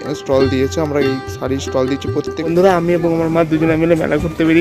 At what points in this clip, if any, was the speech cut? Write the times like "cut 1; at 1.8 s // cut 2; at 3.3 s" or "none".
cut 1; at 2.5 s

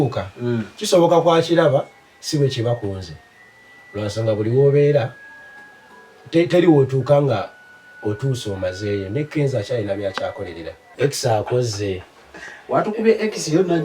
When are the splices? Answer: cut 1; at 10.8 s

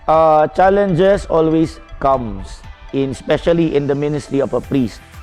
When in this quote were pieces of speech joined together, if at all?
none

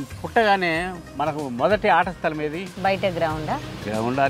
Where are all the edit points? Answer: cut 1; at 1.0 s // cut 2; at 2.7 s

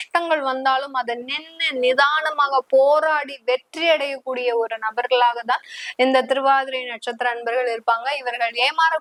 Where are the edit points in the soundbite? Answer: none

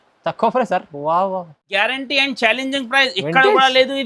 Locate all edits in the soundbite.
cut 1; at 1.7 s

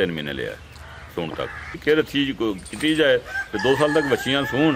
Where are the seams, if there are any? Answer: cut 1; at 1.7 s

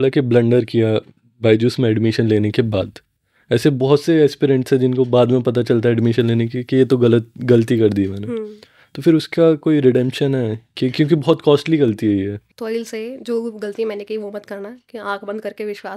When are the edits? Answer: cut 1; at 12.4 s

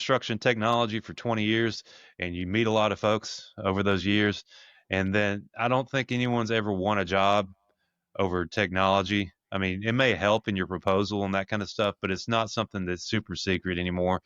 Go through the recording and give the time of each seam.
none

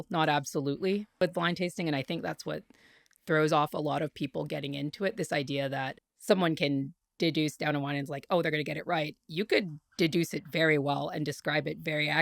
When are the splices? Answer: cut 1; at 1.2 s

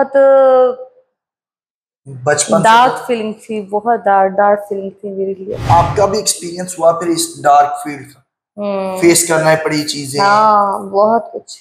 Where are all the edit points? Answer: none

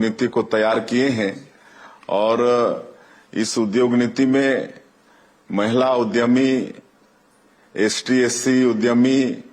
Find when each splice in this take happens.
cut 1; at 4.4 s

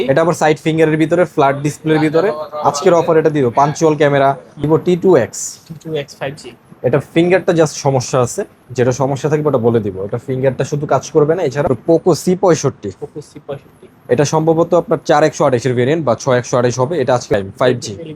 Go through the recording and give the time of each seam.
cut 1; at 4.7 s // cut 2; at 11.7 s // cut 3; at 17.3 s

